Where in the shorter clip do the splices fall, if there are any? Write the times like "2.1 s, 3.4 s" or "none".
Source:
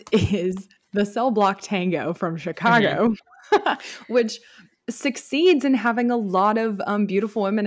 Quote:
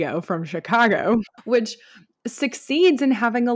1.4 s